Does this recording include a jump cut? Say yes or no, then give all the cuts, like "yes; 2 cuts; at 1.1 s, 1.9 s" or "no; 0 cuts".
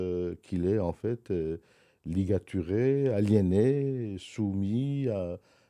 no; 0 cuts